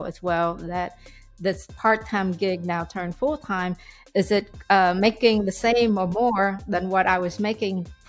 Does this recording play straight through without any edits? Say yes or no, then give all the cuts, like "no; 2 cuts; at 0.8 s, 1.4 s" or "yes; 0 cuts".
yes; 0 cuts